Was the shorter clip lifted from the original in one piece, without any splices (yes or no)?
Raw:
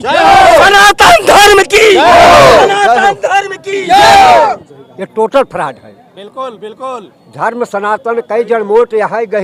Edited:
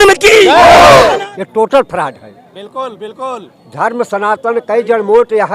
no